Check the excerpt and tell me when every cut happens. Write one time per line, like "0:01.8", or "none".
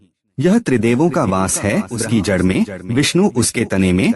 0:02.0